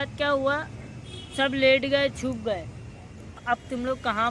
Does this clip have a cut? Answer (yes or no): yes